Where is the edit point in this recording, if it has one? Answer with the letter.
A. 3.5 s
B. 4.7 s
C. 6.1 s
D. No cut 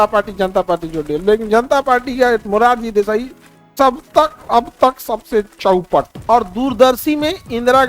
C